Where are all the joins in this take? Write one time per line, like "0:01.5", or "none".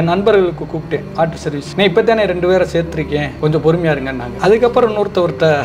none